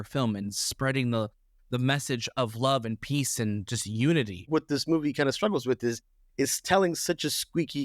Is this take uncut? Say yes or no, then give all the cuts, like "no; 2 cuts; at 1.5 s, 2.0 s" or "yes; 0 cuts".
no; 1 cut; at 4.5 s